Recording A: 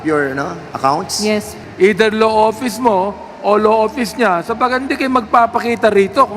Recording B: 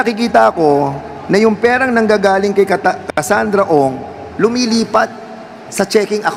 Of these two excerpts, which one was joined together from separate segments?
A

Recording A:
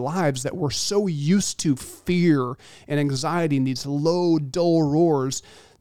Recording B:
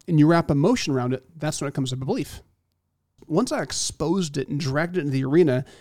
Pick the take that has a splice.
B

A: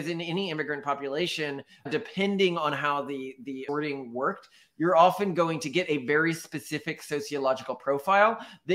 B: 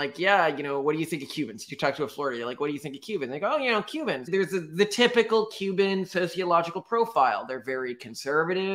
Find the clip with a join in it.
B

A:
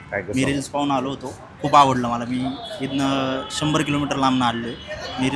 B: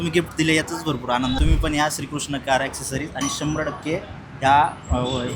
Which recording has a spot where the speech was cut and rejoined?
B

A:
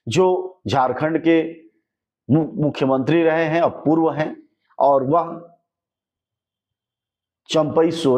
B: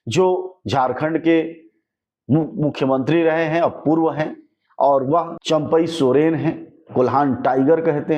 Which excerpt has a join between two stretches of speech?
B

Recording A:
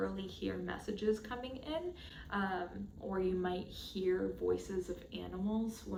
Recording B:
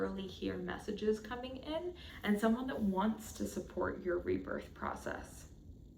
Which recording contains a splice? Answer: B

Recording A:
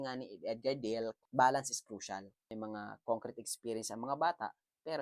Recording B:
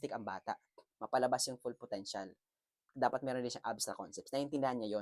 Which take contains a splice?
A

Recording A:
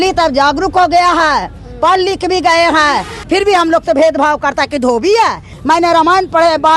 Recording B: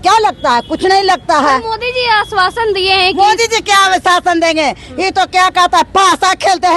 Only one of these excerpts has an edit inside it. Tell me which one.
A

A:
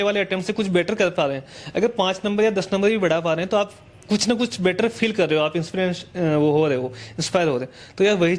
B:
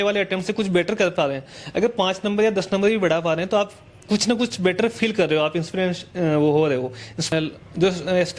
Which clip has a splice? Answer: B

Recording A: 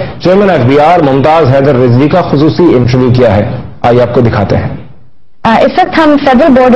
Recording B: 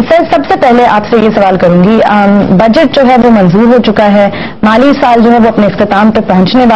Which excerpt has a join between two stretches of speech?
B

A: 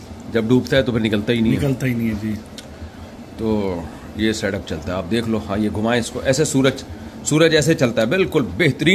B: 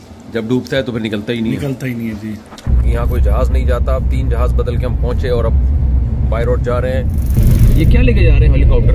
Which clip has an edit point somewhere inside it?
B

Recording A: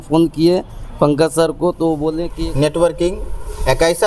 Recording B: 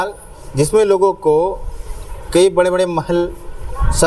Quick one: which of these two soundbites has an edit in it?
A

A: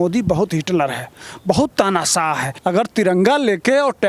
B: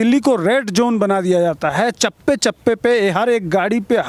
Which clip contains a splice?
A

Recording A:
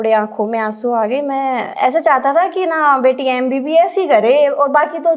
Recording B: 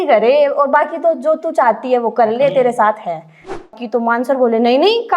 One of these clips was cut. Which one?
B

